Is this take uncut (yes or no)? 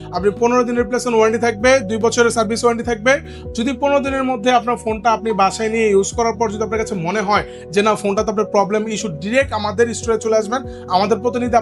yes